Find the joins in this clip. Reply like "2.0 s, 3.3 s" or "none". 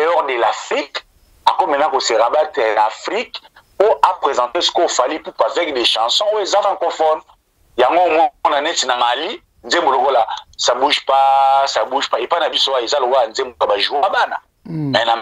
none